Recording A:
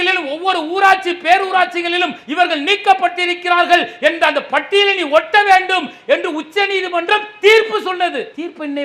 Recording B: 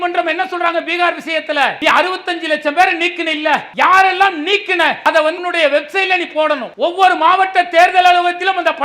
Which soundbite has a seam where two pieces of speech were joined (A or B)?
B